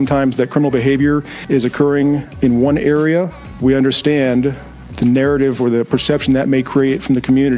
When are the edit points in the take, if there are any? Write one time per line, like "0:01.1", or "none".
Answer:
0:01.3
0:02.3
0:03.4
0:04.9